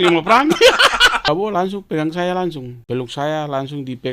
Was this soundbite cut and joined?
yes; 2 cuts; at 1.3 s, 2.7 s

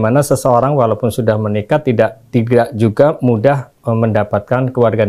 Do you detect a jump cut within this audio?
no; 0 cuts

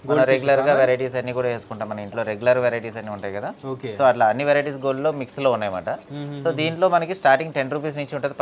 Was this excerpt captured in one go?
yes; 0 cuts

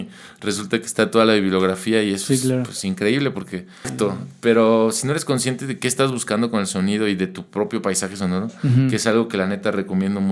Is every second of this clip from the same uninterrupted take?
no; 1 cut; at 3.9 s

